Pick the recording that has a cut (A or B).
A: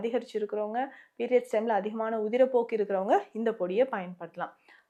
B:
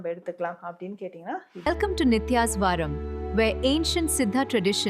B